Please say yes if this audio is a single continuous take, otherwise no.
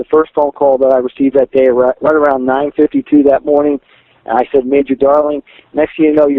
yes